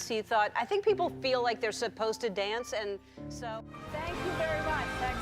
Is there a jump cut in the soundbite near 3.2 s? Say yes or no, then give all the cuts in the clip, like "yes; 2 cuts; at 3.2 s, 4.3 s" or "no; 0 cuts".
yes; 1 cut; at 3.2 s